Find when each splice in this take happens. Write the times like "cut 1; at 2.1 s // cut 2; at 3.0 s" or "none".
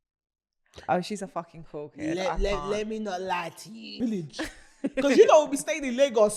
cut 1; at 4.0 s

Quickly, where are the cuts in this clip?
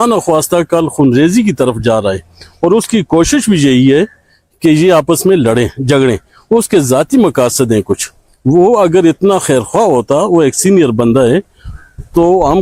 none

